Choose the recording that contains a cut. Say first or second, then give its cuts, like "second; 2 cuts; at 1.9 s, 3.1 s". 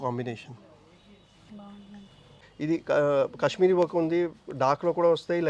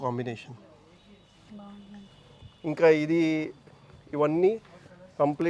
first; 1 cut; at 2.4 s